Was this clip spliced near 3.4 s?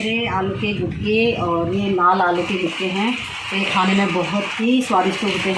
no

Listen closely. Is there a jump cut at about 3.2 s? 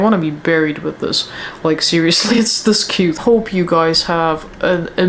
yes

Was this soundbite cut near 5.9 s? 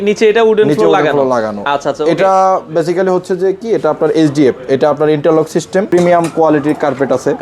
yes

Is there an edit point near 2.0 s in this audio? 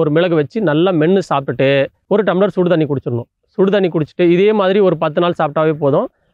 yes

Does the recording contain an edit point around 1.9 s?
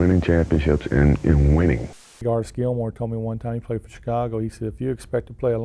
yes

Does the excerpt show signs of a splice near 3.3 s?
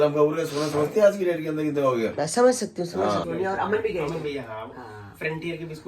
yes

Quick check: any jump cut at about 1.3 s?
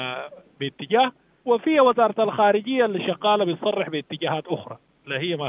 yes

